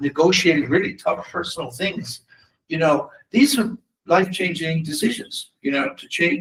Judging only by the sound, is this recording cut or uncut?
uncut